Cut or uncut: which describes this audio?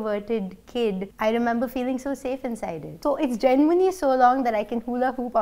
cut